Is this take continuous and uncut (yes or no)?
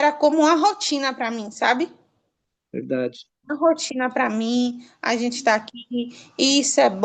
yes